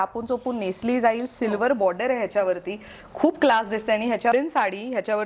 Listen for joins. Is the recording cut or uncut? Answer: cut